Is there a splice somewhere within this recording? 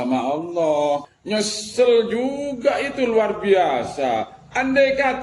yes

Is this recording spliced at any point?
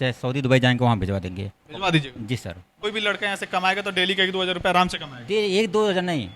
yes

